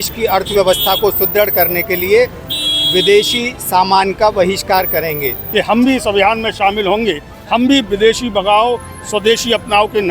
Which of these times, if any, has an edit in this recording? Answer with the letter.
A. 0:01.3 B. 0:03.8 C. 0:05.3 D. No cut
C